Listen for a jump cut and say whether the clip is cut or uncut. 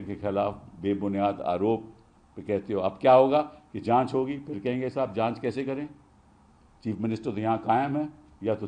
uncut